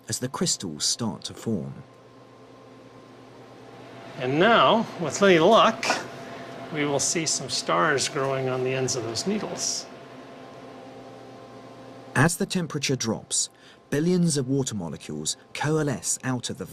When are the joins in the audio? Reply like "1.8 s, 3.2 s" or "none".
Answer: 12.1 s